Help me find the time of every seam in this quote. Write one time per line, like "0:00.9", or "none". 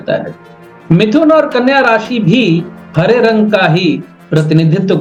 none